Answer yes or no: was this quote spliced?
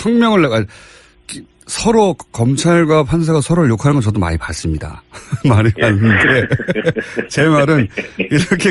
no